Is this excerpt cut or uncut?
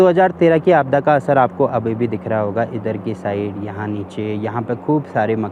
uncut